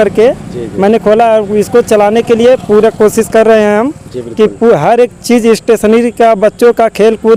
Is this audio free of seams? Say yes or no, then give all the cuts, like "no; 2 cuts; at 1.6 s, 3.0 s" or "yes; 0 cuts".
yes; 0 cuts